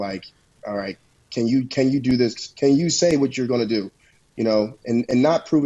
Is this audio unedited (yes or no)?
yes